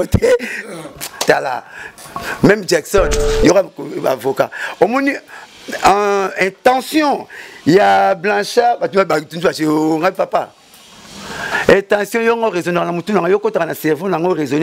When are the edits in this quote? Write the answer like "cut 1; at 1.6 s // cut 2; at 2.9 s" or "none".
cut 1; at 3.2 s